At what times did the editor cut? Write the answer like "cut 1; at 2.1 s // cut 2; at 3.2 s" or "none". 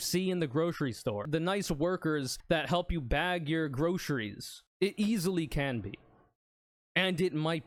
none